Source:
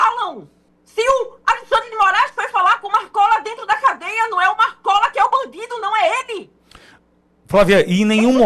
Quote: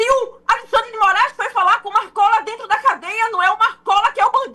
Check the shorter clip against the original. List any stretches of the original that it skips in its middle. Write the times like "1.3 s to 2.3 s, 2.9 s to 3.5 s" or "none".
none